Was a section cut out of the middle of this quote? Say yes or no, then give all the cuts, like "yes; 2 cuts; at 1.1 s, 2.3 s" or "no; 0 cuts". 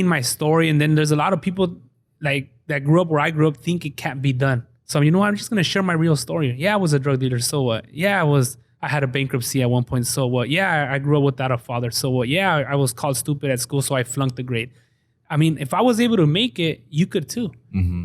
yes; 1 cut; at 4.7 s